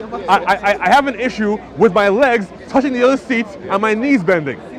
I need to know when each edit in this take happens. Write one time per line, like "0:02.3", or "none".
none